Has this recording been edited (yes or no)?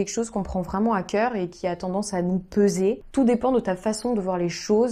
no